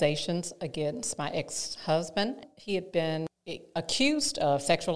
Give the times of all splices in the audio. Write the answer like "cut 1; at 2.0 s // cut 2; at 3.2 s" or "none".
cut 1; at 2.4 s // cut 2; at 3.3 s